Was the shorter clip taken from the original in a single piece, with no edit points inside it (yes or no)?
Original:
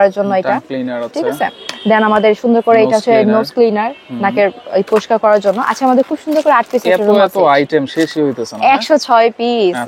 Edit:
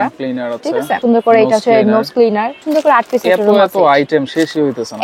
no